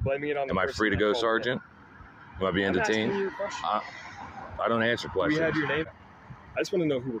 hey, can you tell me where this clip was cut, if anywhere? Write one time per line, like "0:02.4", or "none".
0:05.8